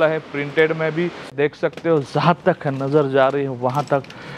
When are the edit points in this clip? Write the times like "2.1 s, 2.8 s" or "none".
1.3 s